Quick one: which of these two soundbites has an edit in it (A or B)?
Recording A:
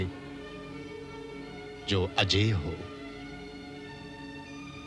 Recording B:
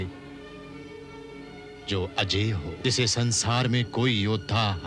B